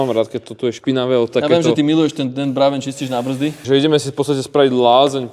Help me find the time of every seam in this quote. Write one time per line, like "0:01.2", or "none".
0:03.6